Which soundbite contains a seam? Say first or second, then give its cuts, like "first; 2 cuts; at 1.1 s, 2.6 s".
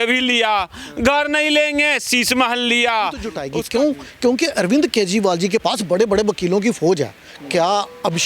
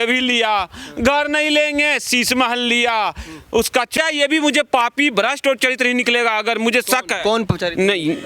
first; 1 cut; at 3.4 s